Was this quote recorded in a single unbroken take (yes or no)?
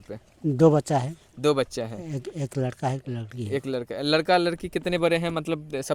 yes